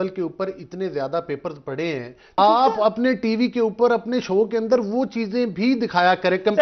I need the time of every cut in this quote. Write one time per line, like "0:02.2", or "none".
0:02.4